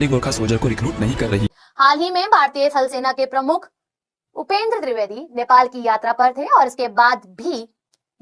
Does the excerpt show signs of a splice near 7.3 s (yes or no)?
no